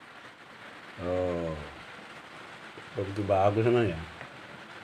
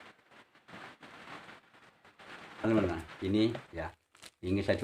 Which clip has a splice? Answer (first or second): second